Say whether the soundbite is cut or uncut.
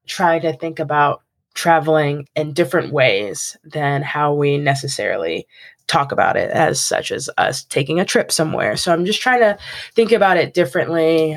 uncut